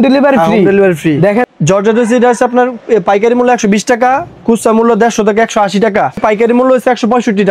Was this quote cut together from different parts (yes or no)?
yes